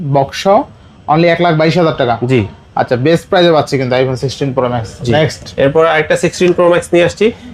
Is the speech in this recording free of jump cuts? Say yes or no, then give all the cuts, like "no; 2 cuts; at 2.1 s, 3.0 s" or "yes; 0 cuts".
yes; 0 cuts